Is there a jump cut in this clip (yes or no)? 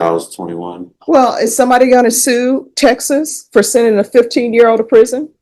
no